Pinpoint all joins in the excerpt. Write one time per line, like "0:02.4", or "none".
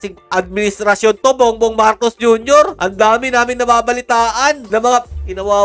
none